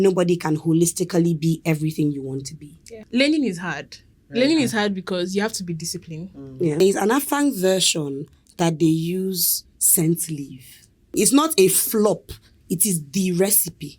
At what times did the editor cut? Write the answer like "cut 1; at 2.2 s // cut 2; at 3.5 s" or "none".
cut 1; at 3.0 s // cut 2; at 6.8 s // cut 3; at 11.2 s